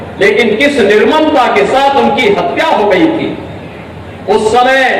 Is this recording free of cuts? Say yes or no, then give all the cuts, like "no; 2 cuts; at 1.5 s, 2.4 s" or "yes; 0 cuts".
yes; 0 cuts